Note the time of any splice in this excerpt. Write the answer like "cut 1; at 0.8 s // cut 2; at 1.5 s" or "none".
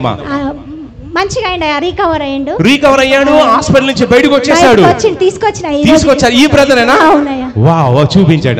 none